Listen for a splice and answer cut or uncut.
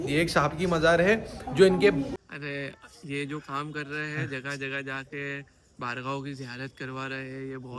cut